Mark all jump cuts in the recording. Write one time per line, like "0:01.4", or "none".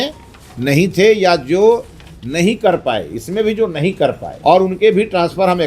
0:04.3